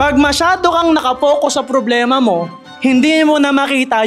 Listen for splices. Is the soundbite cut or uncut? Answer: uncut